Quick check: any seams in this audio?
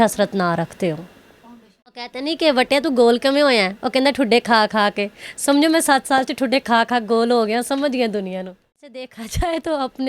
yes; 2 cuts; at 2.1 s, 8.8 s

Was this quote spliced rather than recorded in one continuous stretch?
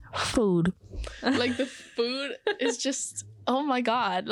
no; 0 cuts

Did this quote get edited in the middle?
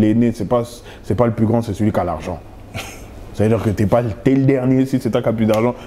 no; 0 cuts

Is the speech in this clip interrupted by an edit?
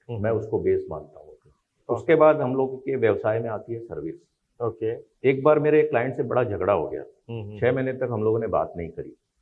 yes; 2 cuts; at 1.7 s, 5.1 s

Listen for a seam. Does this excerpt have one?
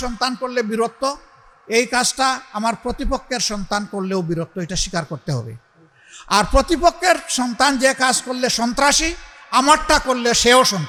no; 0 cuts

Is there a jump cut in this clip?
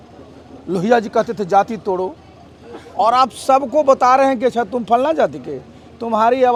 no; 0 cuts

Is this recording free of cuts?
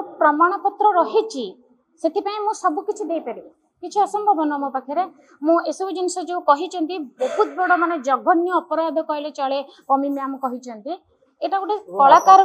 yes; 0 cuts

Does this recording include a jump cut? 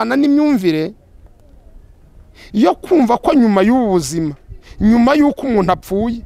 no; 0 cuts

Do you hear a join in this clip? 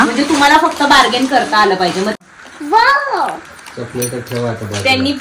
yes; 1 cut; at 2.2 s

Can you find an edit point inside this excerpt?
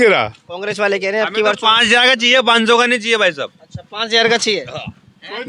no; 0 cuts

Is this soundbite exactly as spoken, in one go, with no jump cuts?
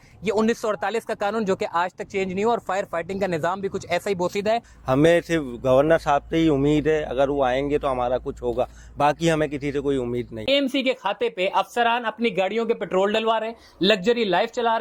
no; 2 cuts; at 4.7 s, 10.4 s

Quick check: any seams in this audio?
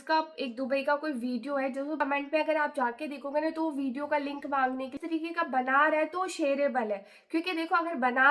yes; 2 cuts; at 2.0 s, 5.0 s

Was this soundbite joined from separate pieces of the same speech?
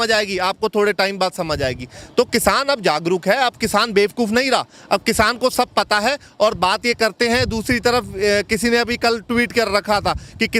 no; 0 cuts

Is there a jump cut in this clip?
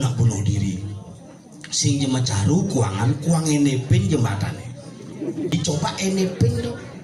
yes; 1 cut; at 5.5 s

